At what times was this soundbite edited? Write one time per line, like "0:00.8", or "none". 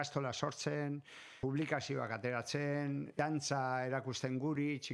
0:01.4
0:03.1